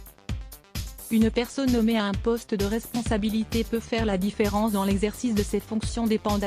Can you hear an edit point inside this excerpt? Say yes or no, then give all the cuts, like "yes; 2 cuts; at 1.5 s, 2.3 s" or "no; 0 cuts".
yes; 1 cut; at 1.0 s